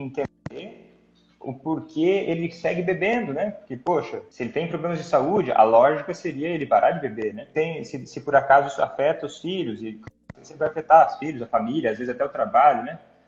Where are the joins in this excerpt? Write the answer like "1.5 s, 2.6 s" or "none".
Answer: 4.2 s, 7.4 s